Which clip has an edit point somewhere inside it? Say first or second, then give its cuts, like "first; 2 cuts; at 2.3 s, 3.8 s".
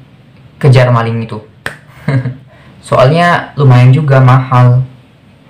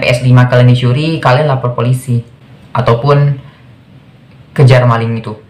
first; 1 cut; at 2.5 s